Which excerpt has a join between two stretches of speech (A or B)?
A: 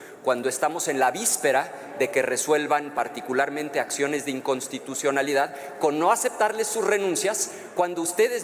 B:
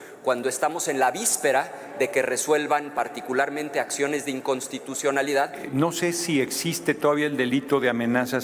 B